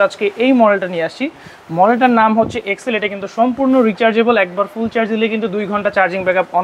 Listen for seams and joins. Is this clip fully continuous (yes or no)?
yes